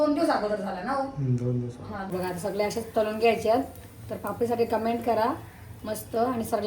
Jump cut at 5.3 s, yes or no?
no